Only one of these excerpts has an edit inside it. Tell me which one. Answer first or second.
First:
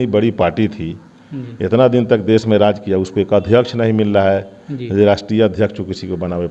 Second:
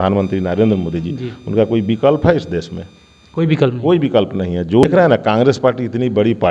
second